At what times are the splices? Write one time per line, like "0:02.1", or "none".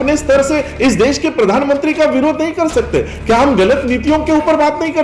none